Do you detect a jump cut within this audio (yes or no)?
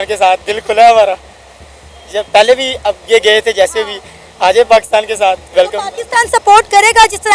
no